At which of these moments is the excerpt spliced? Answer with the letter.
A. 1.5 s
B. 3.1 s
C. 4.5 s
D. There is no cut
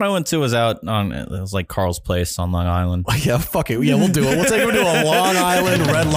B